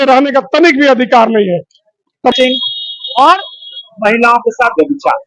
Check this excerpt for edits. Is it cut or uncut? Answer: cut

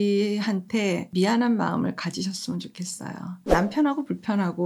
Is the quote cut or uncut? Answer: cut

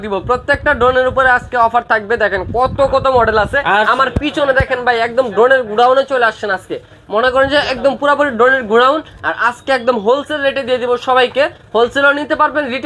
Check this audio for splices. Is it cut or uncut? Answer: uncut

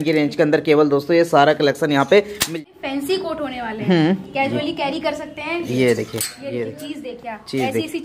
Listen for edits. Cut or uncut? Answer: cut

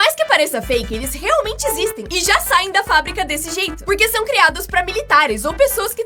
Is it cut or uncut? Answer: uncut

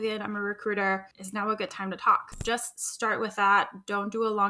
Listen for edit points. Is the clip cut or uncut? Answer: cut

